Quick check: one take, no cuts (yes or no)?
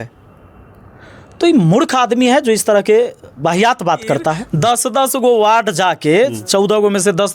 no